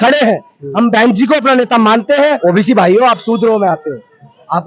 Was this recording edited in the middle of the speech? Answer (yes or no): yes